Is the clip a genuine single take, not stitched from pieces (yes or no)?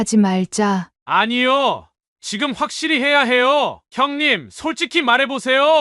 no